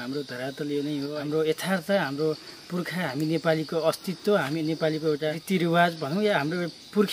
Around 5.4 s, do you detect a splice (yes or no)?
yes